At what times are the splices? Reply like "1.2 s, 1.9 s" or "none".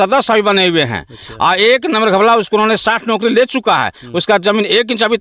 none